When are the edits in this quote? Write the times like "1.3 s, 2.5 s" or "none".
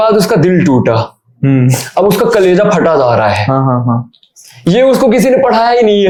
none

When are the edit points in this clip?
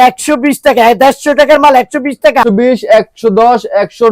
2.4 s

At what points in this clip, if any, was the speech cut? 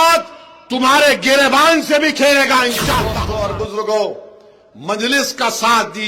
3.1 s

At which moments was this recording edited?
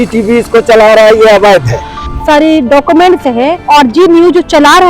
2.1 s, 3.6 s

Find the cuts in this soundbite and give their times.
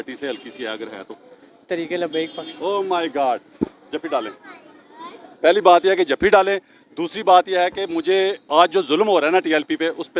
none

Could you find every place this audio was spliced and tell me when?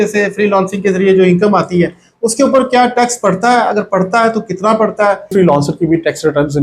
5.3 s

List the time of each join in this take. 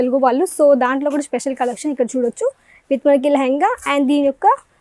none

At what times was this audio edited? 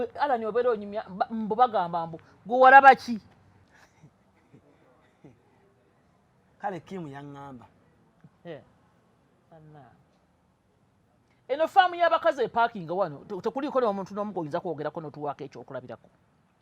3.6 s

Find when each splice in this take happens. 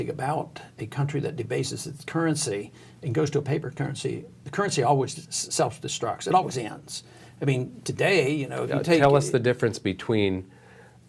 none

